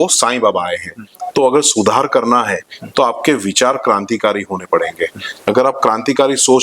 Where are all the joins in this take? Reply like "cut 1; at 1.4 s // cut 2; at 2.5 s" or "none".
cut 1; at 1.1 s